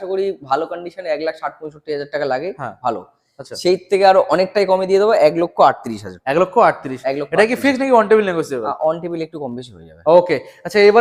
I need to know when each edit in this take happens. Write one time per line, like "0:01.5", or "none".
none

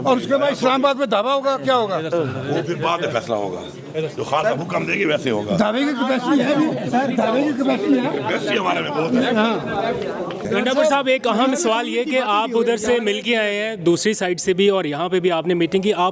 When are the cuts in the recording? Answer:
none

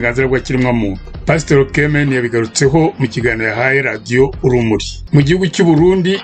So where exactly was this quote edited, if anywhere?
0:04.9

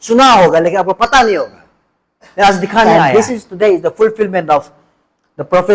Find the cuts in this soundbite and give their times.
0:03.0

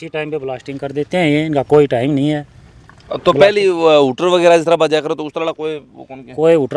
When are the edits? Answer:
none

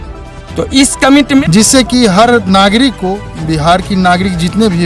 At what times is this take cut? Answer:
0:01.4

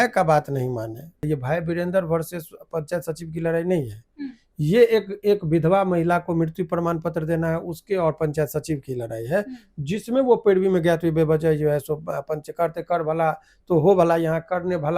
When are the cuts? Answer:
0:01.2

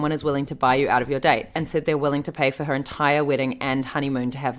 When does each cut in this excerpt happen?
0:01.6

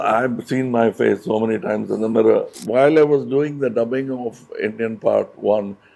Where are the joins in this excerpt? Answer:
0:02.6

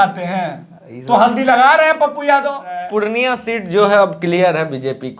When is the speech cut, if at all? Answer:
0:02.8

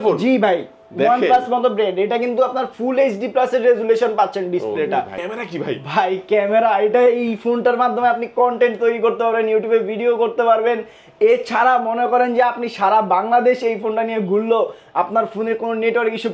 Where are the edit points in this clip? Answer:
0:05.2

